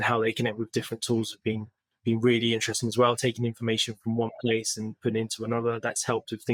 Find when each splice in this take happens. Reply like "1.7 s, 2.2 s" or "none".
none